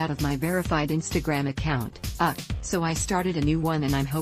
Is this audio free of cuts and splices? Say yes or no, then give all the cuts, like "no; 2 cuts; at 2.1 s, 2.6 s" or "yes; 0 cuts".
yes; 0 cuts